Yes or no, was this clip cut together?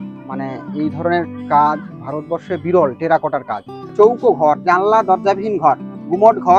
yes